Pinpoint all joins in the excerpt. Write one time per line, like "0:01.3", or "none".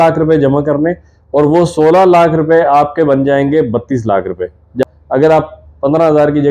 0:04.8